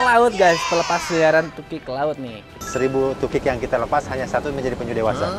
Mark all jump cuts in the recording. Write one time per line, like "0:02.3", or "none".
0:02.6